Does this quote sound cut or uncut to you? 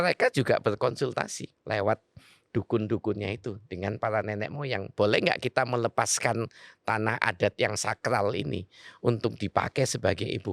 uncut